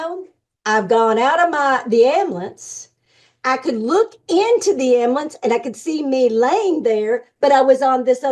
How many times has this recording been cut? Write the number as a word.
zero